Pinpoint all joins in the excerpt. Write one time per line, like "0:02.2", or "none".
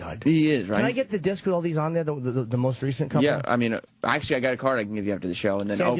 0:04.7